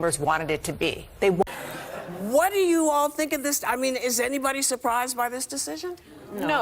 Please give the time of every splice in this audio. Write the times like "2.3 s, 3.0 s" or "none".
1.4 s